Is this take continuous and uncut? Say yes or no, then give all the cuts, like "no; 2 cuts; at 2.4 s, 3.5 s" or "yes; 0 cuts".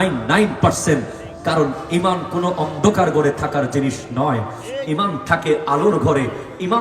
yes; 0 cuts